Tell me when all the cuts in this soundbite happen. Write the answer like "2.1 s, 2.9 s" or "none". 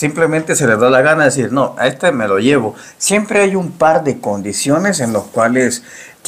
none